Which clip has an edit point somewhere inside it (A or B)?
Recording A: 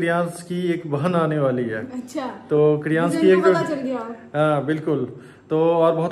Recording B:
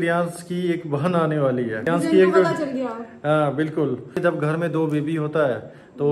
B